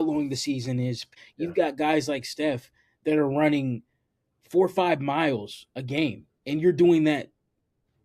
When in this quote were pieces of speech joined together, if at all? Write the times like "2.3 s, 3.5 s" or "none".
1.0 s